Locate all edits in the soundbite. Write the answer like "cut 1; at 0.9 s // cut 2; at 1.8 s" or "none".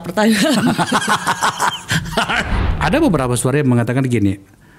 cut 1; at 2.6 s